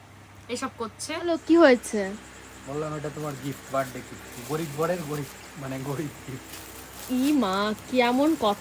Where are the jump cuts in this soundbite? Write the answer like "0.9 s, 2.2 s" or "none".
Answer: 1.2 s